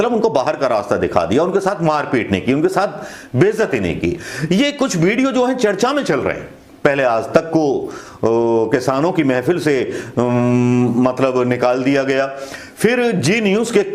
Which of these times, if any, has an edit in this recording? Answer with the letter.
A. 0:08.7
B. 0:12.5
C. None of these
C